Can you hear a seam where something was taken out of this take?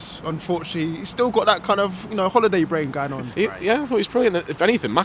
yes; 1 cut; at 3.2 s

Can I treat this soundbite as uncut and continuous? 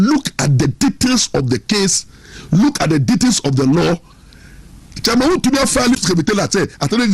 no; 1 cut; at 5.9 s

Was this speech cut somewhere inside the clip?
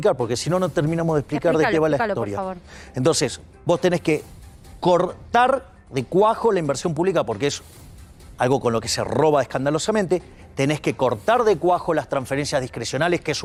no; 0 cuts

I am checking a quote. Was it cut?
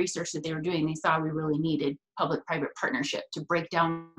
no; 0 cuts

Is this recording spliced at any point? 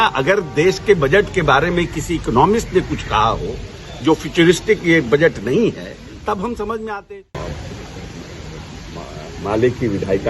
yes; 1 cut; at 7.3 s

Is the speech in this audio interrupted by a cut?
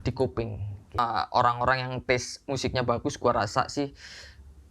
yes; 1 cut; at 1.0 s

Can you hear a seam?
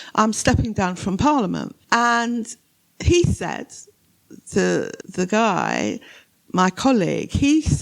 yes; 2 cuts; at 1.8 s, 5.0 s

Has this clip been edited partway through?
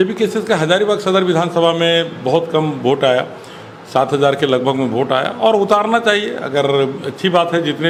no; 0 cuts

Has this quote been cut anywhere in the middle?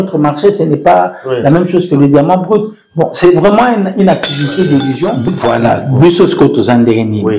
yes; 1 cut; at 5.2 s

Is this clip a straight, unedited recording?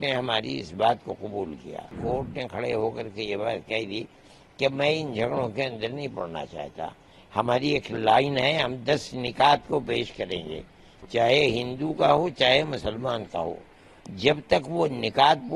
no; 1 cut; at 2.0 s

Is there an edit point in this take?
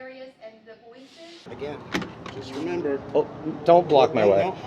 yes; 1 cut; at 1.4 s

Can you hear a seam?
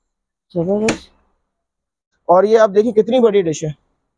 yes; 1 cut; at 2.1 s

